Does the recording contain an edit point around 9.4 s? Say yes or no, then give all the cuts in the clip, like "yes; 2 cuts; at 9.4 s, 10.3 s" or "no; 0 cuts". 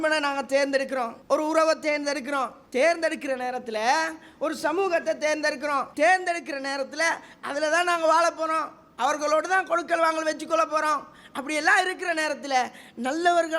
no; 3 cuts; at 1.2 s, 2.6 s, 5.9 s